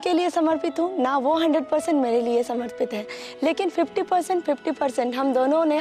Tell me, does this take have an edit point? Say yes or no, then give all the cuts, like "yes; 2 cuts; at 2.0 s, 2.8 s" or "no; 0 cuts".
no; 0 cuts